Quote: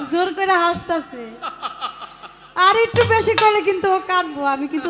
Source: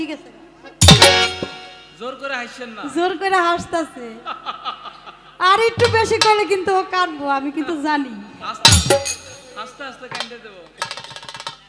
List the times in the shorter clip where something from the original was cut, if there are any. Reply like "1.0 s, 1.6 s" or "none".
none

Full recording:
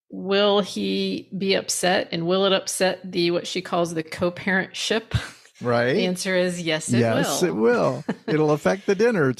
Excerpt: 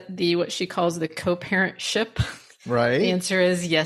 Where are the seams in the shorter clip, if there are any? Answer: none

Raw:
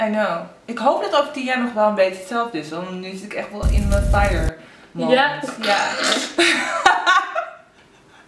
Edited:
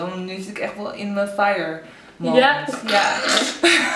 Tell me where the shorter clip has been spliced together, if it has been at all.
none

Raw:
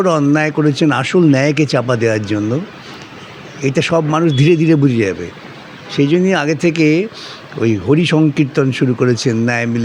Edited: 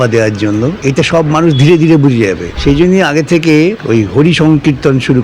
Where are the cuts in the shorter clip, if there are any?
0.8 s, 2.5 s, 3.8 s

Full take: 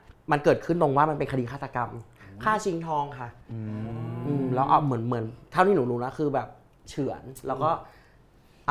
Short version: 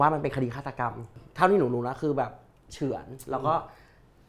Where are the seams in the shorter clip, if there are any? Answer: 1.2 s

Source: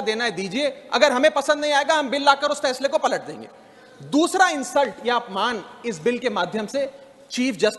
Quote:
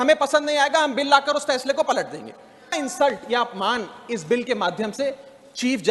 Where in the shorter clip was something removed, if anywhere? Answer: 2.8 s

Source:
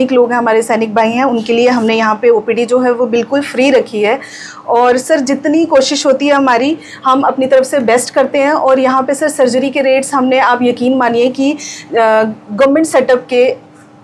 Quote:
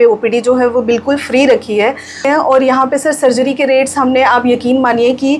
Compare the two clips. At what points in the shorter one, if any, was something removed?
2.2 s

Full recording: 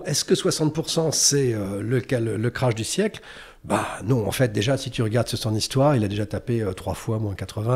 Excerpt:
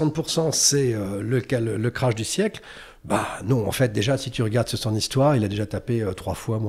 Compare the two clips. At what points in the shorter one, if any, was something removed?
none

